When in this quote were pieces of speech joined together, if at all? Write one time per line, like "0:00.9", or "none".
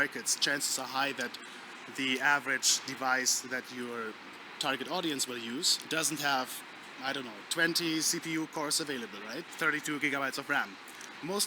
0:05.8
0:09.5